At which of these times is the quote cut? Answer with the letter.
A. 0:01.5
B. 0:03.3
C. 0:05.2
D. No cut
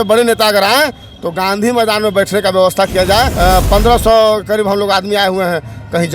B